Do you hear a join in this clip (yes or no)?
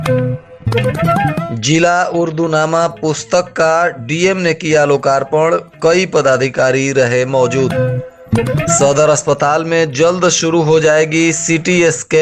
yes